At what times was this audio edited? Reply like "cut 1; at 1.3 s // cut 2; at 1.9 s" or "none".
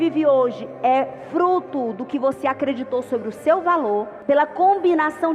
cut 1; at 4.1 s